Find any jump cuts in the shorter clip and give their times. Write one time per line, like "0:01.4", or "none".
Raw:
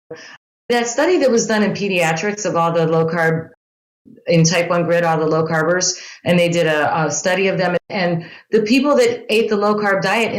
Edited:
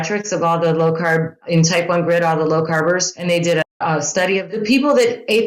0:01.4
0:03.1
0:04.5